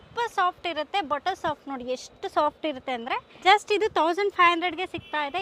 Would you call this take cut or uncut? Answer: cut